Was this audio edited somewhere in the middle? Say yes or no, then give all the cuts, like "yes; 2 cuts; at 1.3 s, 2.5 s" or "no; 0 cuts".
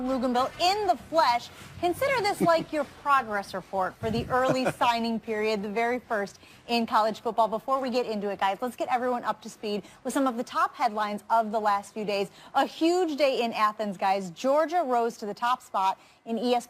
no; 0 cuts